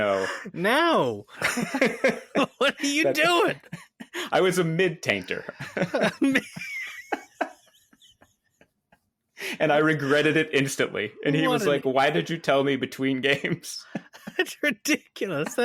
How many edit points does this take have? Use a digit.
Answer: 0